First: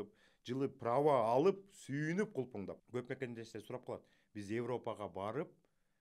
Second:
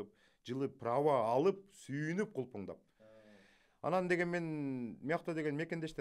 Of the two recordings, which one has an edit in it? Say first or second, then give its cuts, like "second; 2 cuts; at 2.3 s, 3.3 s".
first; 1 cut; at 2.8 s